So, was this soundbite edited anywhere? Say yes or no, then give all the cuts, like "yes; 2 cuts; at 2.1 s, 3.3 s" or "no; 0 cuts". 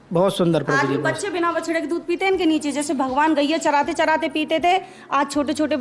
no; 0 cuts